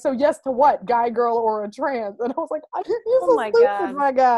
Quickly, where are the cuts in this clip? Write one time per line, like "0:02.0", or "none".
none